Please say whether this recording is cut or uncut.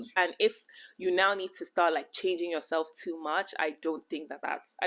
uncut